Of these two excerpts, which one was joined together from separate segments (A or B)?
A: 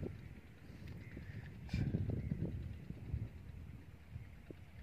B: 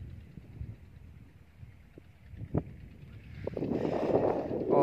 B